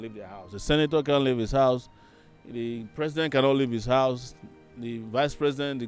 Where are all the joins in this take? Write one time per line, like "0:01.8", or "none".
none